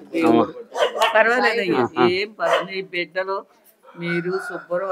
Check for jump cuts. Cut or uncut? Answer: uncut